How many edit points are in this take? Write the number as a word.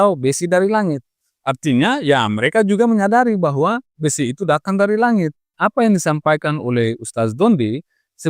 one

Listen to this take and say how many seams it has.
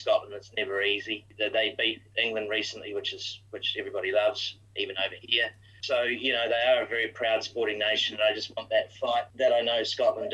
four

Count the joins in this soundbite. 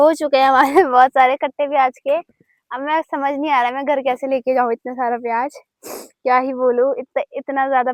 zero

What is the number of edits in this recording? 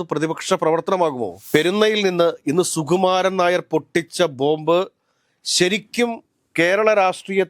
one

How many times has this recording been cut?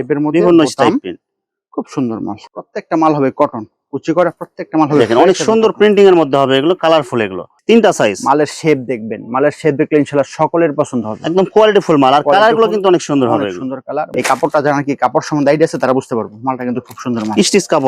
three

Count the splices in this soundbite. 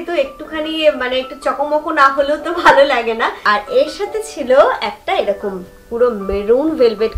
one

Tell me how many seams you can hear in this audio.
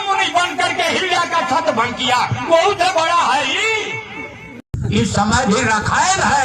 one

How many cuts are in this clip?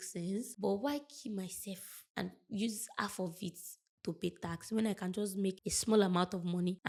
zero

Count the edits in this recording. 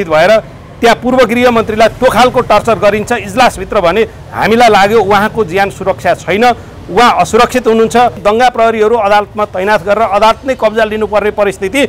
one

